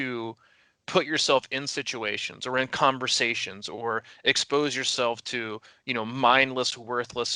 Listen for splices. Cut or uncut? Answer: uncut